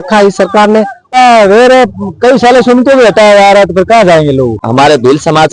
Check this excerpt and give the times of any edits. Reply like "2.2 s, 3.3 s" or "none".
1.1 s, 4.6 s